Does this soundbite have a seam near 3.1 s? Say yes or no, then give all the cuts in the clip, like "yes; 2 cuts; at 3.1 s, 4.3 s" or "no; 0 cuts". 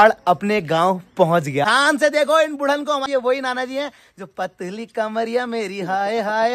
yes; 2 cuts; at 1.7 s, 3.1 s